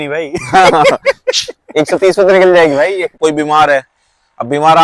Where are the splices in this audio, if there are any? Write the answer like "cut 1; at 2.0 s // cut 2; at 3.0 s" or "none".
cut 1; at 3.1 s